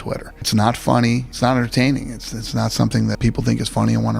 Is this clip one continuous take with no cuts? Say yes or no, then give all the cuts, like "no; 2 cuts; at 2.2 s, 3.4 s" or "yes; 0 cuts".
no; 1 cut; at 3.2 s